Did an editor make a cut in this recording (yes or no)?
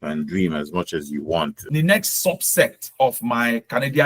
yes